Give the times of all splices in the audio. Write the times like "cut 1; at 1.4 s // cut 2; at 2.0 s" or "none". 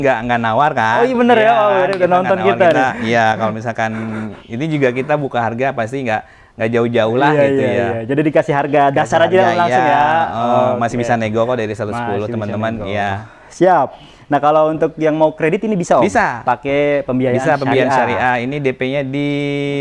none